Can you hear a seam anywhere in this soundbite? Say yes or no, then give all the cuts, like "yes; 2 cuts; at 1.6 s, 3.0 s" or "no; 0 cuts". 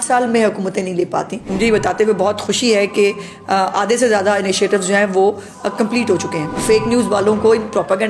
yes; 2 cuts; at 1.4 s, 6.6 s